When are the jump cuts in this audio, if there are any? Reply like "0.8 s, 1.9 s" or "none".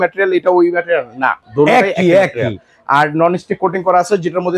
1.4 s